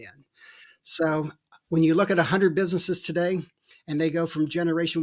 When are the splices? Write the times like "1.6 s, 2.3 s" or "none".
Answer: none

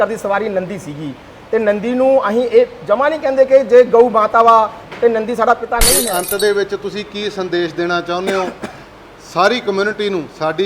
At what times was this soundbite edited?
6.0 s

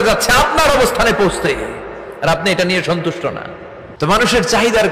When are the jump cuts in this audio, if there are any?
3.8 s

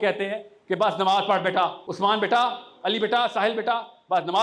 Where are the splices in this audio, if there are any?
1.8 s

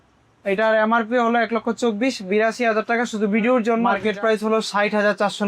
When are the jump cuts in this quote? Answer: 3.9 s

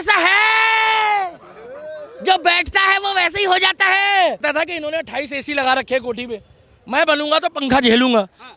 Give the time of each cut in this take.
4.4 s

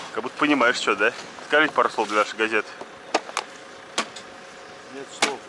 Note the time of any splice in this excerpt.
1.3 s

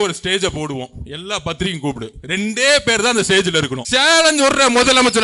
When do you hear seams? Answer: 3.8 s

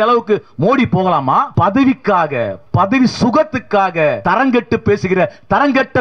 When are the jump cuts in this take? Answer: 1.5 s, 4.2 s

